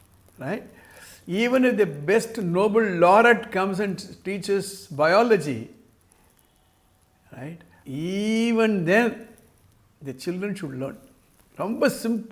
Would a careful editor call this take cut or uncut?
cut